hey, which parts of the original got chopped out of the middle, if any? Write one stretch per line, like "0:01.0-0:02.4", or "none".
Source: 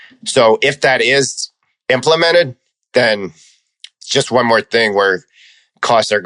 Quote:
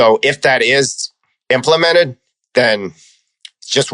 none